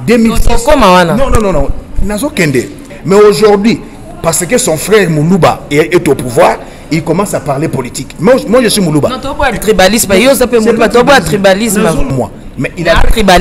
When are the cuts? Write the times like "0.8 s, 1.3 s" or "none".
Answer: 2.9 s, 12.1 s